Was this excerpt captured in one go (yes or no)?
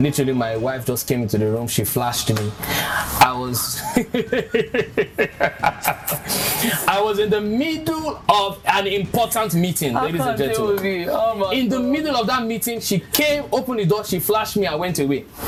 yes